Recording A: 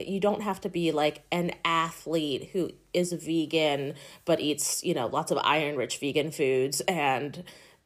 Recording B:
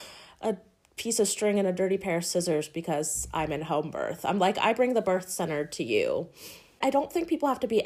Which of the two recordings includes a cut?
B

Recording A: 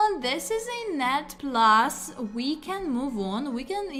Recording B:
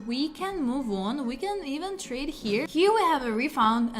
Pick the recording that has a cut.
B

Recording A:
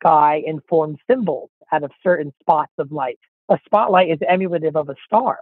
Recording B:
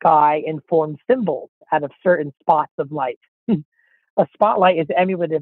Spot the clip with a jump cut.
A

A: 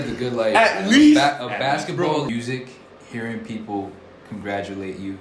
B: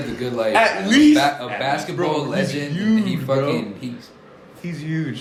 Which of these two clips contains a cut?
A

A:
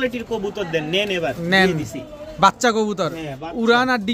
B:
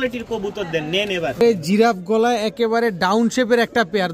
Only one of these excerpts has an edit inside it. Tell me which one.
B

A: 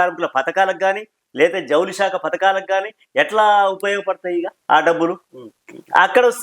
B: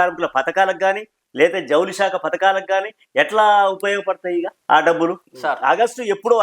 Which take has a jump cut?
B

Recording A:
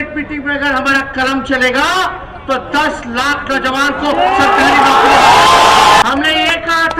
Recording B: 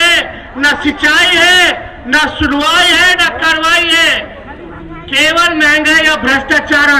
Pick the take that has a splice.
A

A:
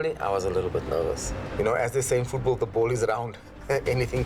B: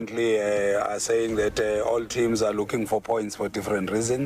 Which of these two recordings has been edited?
A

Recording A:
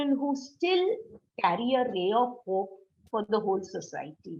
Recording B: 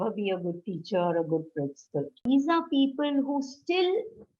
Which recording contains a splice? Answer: B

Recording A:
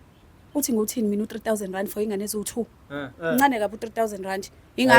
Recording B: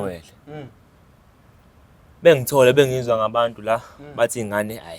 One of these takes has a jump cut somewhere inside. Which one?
A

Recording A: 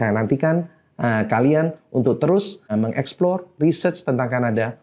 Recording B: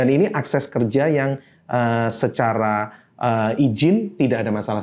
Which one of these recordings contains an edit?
A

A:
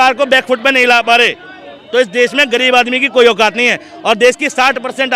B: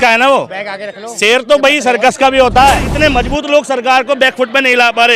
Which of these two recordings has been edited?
B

